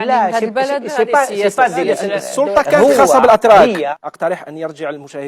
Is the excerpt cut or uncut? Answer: cut